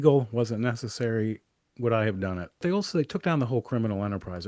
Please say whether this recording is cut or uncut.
cut